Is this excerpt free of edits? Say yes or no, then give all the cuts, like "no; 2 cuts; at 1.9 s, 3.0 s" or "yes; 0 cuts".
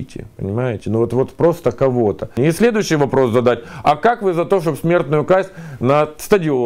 no; 1 cut; at 2.4 s